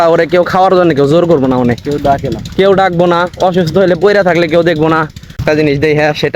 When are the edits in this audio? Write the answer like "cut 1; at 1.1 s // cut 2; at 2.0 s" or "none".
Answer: cut 1; at 5.4 s